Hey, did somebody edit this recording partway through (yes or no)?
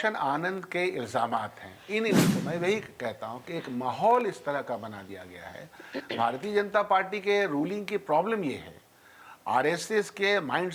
yes